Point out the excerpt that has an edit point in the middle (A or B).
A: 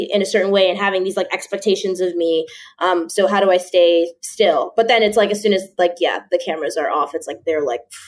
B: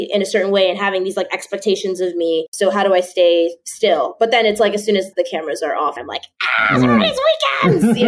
B